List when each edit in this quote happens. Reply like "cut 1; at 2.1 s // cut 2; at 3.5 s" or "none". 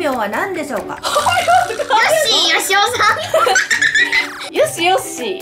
cut 1; at 4.4 s